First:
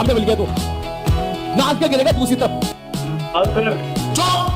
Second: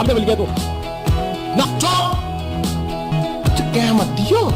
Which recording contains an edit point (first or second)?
second